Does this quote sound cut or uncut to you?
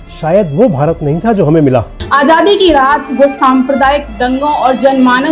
cut